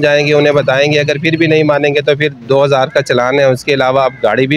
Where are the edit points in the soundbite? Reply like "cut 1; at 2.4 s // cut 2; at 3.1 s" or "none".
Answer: none